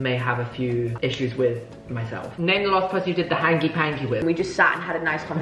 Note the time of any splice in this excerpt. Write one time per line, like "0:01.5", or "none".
0:02.3
0:04.2